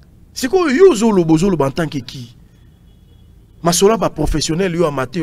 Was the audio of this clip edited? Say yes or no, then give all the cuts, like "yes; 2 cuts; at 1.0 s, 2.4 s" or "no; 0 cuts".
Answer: no; 0 cuts